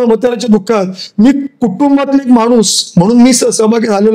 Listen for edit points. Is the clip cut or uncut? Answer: uncut